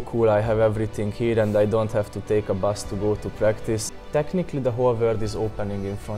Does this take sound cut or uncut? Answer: cut